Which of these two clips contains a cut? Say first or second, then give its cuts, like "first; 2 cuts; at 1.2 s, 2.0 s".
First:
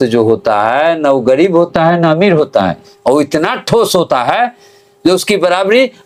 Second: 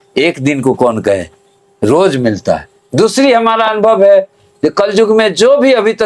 second; 1 cut; at 2.8 s